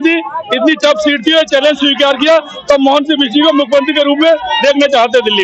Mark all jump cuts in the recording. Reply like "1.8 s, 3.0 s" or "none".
none